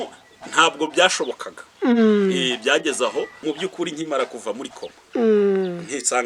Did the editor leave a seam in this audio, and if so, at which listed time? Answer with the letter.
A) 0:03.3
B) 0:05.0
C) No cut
A